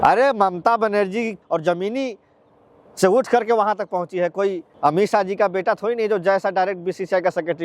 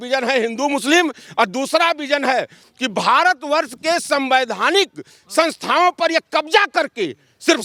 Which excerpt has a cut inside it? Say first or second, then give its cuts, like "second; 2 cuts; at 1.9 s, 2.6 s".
first; 2 cuts; at 1.4 s, 4.7 s